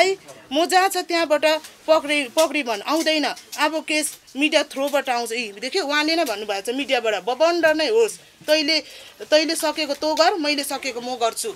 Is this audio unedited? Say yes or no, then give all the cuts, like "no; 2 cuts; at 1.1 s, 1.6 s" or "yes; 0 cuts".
yes; 0 cuts